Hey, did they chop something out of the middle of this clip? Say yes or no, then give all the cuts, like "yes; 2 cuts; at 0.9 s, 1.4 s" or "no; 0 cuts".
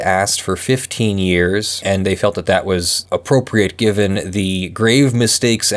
yes; 1 cut; at 1.7 s